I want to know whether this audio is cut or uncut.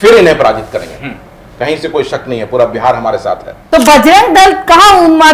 cut